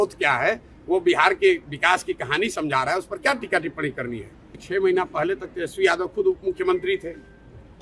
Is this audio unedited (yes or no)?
no